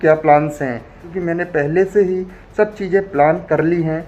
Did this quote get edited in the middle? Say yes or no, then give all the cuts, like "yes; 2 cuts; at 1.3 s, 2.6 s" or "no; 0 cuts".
yes; 1 cut; at 1.1 s